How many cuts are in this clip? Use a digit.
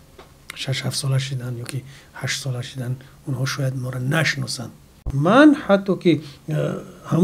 1